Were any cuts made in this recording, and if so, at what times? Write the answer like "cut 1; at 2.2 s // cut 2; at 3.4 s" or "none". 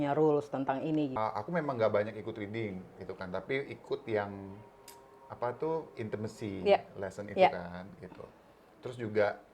cut 1; at 1.2 s